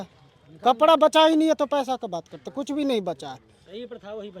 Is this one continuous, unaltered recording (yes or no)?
yes